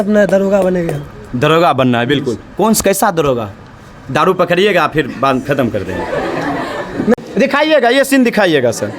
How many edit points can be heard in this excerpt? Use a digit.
1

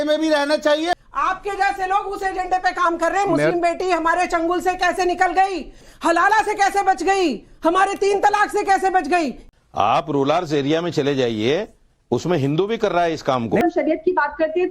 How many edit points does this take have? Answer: 4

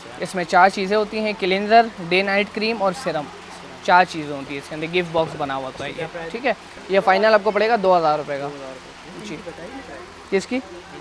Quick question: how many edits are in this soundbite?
0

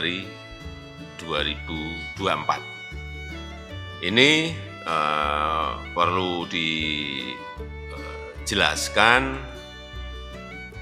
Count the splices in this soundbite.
2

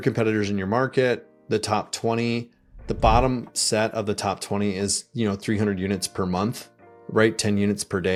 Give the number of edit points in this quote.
0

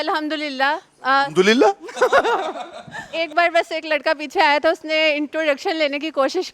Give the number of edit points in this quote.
2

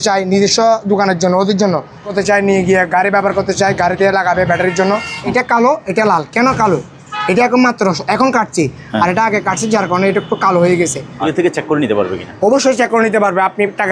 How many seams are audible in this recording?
3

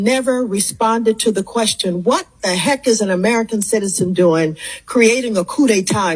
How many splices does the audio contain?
0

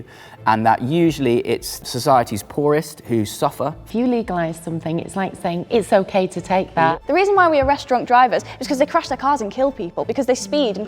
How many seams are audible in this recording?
3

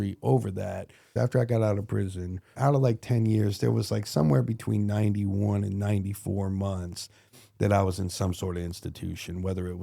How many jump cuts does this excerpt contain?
2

